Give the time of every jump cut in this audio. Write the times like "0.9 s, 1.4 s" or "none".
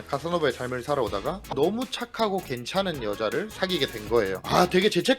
1.5 s